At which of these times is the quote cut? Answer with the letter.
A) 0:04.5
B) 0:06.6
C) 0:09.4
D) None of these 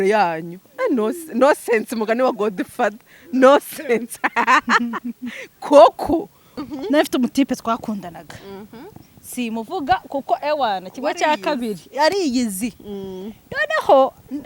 B